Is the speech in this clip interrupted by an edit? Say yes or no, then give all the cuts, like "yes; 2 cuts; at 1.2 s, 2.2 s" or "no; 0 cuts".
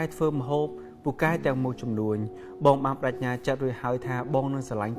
no; 0 cuts